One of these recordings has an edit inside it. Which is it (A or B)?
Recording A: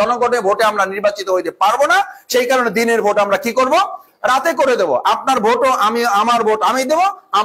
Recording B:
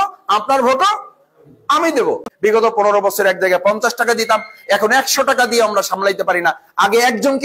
B